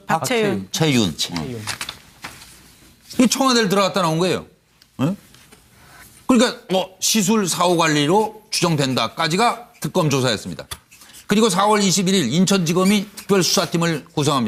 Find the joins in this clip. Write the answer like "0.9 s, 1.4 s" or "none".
none

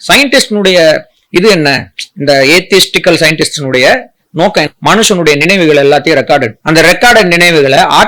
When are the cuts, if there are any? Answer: 4.7 s, 6.6 s

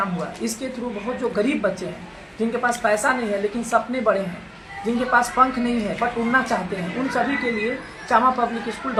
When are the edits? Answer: none

